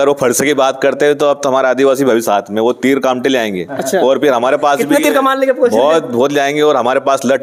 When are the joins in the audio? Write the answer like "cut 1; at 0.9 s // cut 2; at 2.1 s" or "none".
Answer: none